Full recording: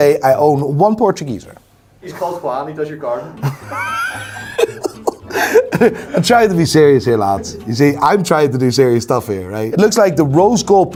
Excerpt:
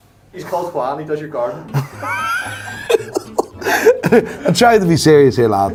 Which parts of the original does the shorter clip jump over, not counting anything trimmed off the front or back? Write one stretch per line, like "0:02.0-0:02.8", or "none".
none